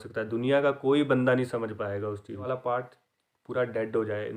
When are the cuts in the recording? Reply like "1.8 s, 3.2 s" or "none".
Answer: 2.5 s